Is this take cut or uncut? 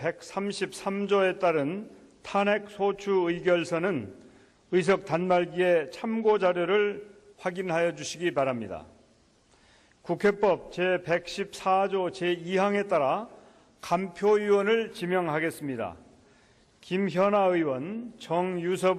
cut